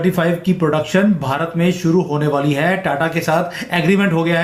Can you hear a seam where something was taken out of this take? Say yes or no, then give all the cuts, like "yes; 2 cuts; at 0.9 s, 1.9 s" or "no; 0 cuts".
no; 0 cuts